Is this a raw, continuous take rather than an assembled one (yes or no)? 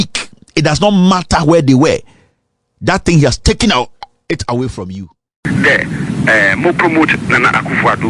no